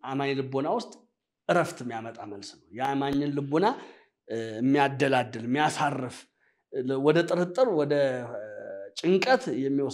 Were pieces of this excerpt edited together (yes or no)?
no